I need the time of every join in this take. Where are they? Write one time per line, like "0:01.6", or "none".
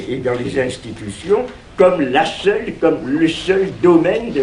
0:03.0